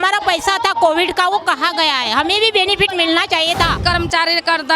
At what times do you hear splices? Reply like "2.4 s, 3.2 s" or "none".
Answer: 3.8 s